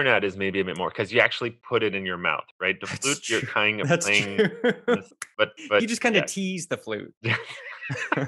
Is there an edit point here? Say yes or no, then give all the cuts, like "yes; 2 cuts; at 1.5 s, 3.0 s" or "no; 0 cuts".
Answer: no; 0 cuts